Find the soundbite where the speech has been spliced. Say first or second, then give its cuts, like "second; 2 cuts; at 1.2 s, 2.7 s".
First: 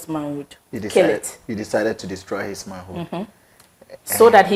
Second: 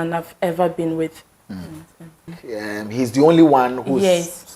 second; 1 cut; at 2.4 s